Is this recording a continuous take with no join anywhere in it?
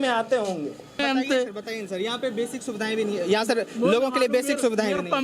no; 1 cut; at 1.0 s

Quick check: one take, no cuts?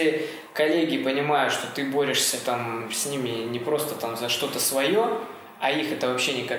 yes; 0 cuts

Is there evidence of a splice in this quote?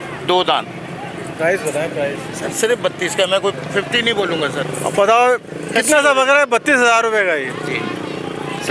no; 0 cuts

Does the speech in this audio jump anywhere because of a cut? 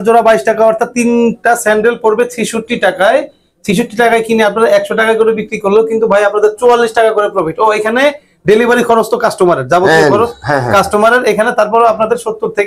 no; 0 cuts

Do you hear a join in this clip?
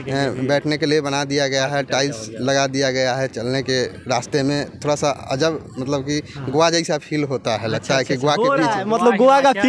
no; 0 cuts

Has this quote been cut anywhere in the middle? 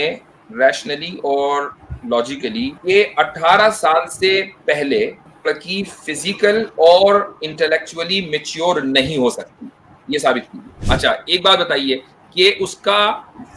yes; 3 cuts; at 2.8 s, 5.3 s, 10.8 s

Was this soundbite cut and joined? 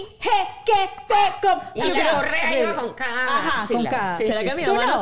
no; 0 cuts

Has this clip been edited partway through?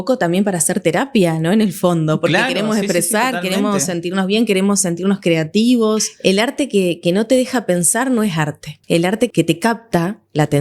yes; 2 cuts; at 6.1 s, 9.2 s

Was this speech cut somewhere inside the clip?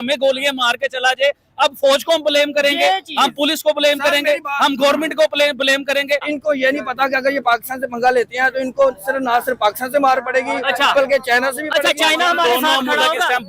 yes; 1 cut; at 6.3 s

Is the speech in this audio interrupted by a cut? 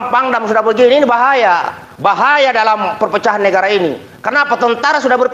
no; 0 cuts

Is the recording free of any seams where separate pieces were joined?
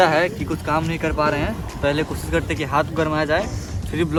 yes; 0 cuts

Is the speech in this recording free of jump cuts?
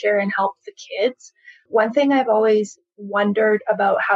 no; 1 cut; at 1.7 s

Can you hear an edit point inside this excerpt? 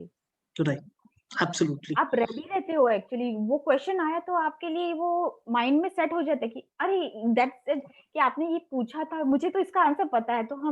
no; 0 cuts

